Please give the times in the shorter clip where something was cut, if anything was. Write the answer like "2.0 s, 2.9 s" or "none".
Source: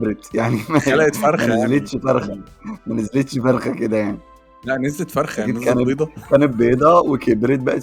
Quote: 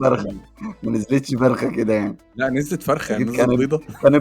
2.2 s